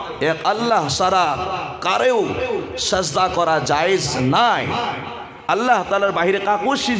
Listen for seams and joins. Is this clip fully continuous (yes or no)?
yes